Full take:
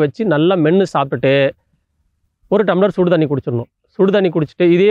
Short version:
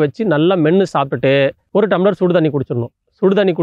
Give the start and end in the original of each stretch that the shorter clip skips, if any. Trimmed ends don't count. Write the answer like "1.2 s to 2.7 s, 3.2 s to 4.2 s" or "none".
1.6 s to 2.4 s